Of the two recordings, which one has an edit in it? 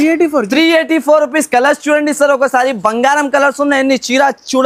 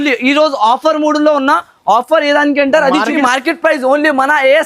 second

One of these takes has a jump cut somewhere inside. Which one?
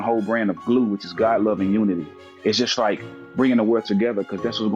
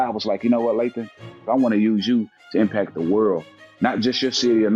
second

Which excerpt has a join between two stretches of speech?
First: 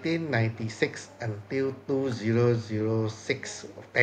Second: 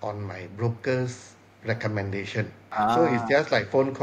second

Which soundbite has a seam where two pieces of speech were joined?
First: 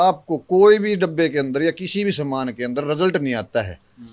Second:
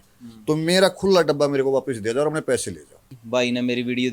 second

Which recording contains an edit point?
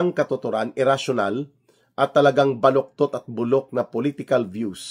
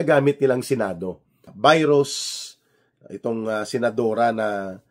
second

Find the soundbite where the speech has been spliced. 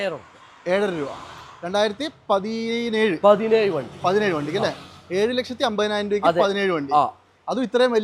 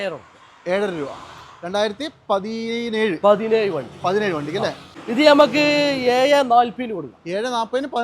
second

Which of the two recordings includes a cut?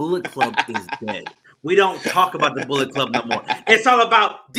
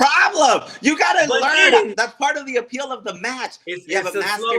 second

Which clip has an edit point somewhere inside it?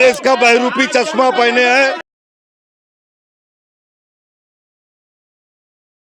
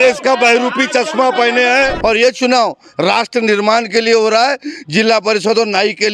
second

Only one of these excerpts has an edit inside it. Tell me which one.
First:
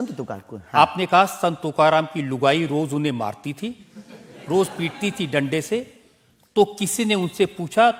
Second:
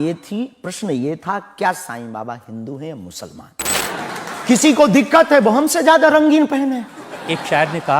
second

